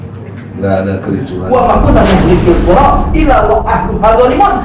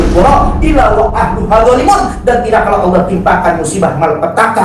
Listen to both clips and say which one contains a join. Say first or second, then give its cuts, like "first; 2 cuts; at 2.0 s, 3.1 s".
first; 1 cut; at 1.5 s